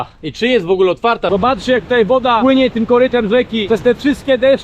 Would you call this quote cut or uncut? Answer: cut